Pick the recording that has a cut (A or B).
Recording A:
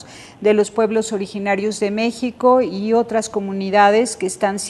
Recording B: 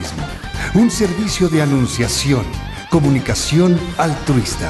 A